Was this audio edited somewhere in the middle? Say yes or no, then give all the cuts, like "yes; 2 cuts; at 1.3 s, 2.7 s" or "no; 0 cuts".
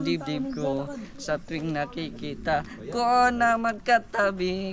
no; 0 cuts